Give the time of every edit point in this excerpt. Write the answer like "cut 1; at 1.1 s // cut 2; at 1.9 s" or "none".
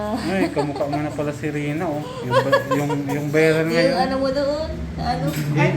cut 1; at 3.1 s